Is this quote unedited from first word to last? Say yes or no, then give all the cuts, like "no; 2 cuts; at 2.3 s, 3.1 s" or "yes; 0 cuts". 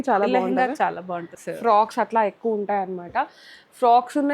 no; 1 cut; at 1.4 s